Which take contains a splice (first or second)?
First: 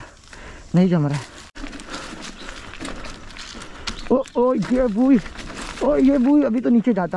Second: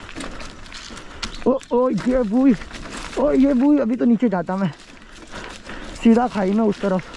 first